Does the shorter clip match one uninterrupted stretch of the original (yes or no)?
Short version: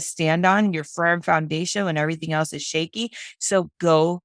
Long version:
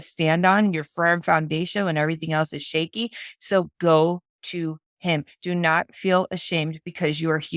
yes